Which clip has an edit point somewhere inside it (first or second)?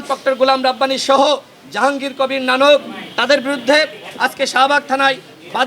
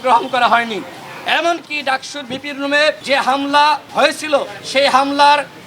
second